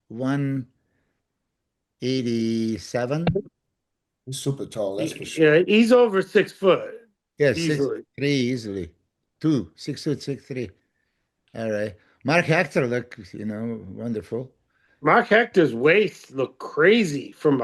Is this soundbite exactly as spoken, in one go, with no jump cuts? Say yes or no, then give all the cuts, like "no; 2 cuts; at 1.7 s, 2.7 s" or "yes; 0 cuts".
yes; 0 cuts